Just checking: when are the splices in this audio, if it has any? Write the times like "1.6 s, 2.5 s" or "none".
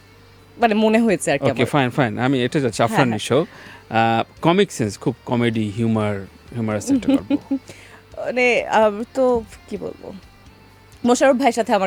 none